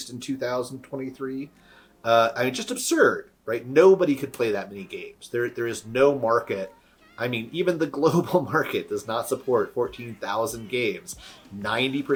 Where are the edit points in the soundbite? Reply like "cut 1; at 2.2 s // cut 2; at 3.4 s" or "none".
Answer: none